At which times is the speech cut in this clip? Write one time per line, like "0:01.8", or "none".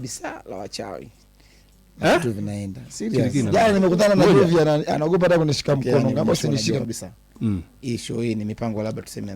0:03.3
0:06.7